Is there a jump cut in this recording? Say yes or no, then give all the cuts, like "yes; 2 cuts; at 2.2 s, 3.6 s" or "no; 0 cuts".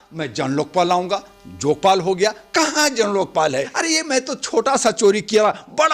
yes; 1 cut; at 3.7 s